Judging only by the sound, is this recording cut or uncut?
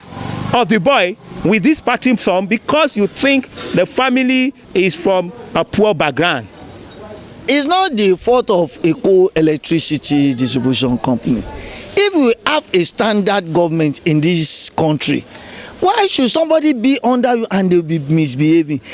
cut